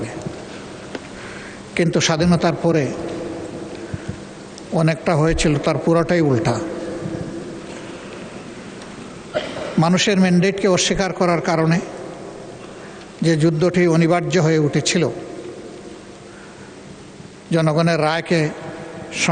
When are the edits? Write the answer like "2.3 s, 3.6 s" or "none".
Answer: none